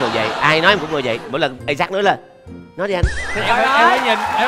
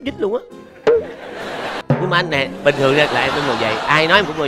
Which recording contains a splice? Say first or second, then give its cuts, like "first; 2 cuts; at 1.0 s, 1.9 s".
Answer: second; 1 cut; at 1.8 s